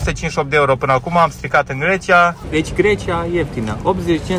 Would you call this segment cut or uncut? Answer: cut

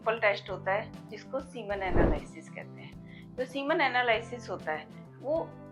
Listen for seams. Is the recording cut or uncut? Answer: uncut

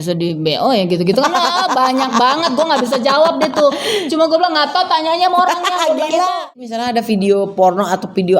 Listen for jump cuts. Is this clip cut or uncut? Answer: cut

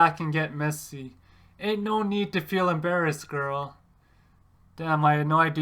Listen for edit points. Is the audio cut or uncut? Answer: uncut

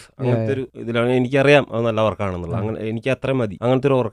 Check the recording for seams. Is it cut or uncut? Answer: uncut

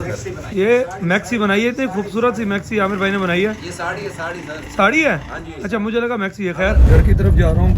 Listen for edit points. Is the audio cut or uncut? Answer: cut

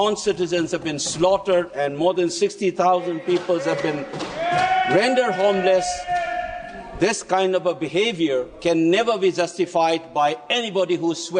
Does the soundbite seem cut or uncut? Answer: uncut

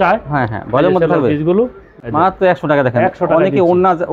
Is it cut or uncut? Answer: cut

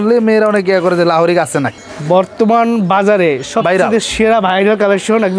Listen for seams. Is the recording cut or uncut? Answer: cut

